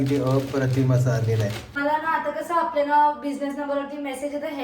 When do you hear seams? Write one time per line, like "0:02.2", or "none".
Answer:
0:01.7